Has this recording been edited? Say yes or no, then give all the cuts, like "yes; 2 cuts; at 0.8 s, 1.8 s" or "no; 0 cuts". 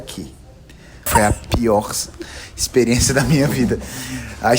yes; 1 cut; at 1.1 s